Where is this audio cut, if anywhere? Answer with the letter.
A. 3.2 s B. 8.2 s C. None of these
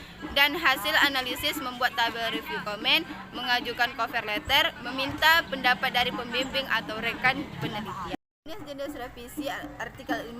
B